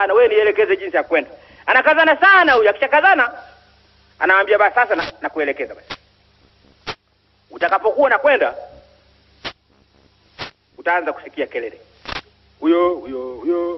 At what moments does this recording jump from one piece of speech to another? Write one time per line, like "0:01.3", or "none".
0:02.3